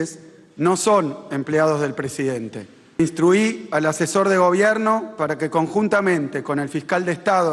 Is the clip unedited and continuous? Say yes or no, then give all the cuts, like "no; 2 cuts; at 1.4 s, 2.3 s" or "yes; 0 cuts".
no; 1 cut; at 3.0 s